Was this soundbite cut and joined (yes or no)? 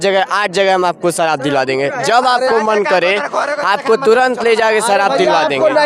no